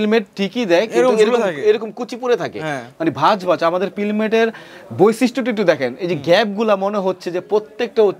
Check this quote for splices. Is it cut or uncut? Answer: uncut